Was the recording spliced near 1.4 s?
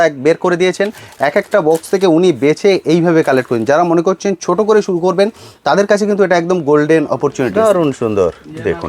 no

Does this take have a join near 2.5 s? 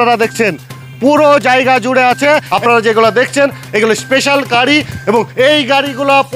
yes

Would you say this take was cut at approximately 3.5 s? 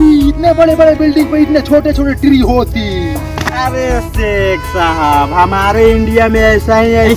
no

